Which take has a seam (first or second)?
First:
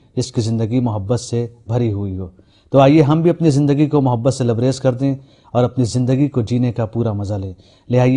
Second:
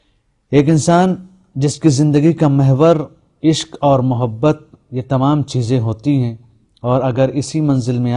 first